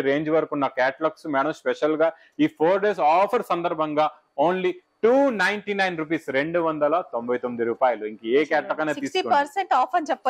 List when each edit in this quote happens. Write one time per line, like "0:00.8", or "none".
none